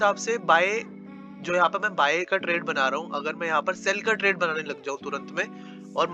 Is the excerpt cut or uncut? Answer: uncut